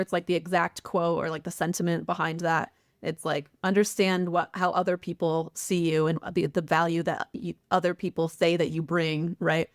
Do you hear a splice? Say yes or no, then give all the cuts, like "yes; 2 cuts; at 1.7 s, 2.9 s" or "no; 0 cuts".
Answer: no; 0 cuts